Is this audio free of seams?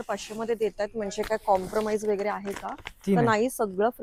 yes; 0 cuts

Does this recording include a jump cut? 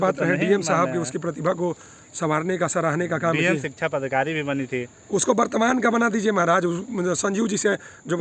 no; 0 cuts

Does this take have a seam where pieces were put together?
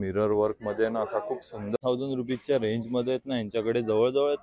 yes; 1 cut; at 1.8 s

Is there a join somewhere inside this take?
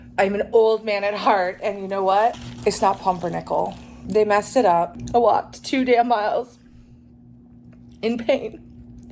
yes; 3 cuts; at 2.5 s, 3.9 s, 5.0 s

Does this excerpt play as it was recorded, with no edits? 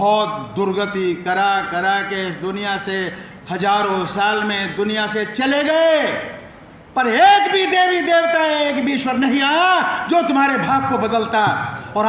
yes; 0 cuts

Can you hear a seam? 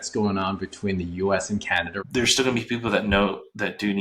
yes; 1 cut; at 1.9 s

